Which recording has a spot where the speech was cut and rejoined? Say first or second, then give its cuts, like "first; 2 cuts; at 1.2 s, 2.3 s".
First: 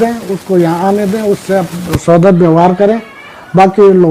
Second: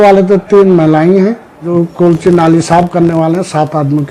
second; 1 cut; at 1.7 s